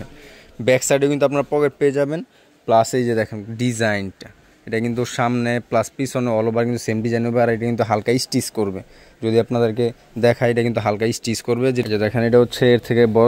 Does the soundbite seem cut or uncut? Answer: cut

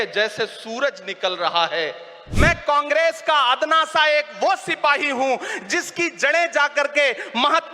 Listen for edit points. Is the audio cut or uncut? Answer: cut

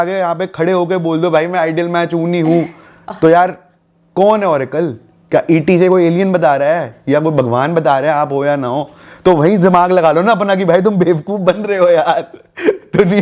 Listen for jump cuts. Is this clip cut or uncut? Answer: uncut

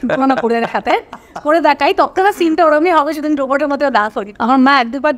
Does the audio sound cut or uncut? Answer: cut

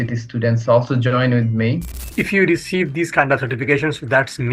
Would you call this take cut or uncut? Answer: cut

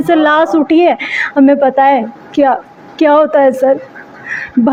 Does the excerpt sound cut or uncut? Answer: uncut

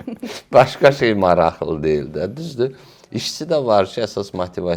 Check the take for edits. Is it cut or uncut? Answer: uncut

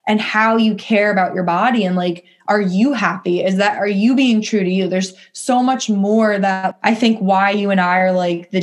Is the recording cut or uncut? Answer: cut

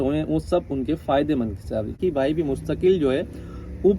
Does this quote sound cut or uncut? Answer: cut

